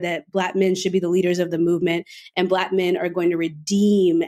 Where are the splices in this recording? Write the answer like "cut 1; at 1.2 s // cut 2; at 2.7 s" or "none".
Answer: none